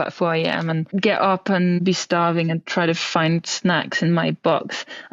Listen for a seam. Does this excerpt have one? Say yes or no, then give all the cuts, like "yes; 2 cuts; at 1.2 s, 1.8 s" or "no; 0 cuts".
yes; 2 cuts; at 0.9 s, 1.8 s